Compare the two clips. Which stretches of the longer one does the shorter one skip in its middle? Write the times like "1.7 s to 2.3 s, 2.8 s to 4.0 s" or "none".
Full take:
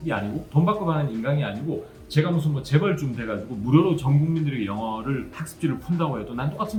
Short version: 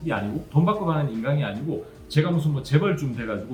none